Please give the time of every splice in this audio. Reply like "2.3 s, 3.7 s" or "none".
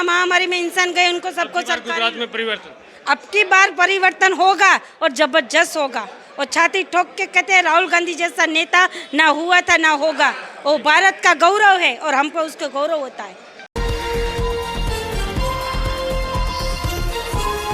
13.6 s